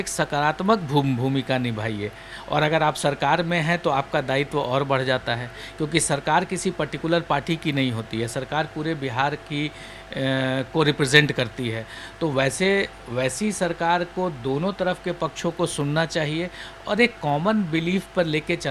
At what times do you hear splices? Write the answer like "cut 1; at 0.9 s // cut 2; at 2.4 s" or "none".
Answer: none